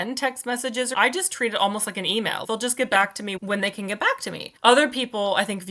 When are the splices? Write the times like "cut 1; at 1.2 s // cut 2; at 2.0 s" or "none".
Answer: cut 1; at 0.9 s // cut 2; at 2.4 s // cut 3; at 3.4 s // cut 4; at 4.5 s